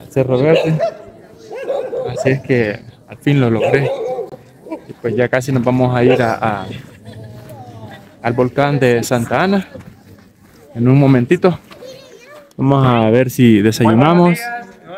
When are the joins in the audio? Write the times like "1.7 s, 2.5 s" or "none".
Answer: none